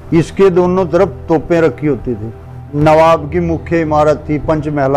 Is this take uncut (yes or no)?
no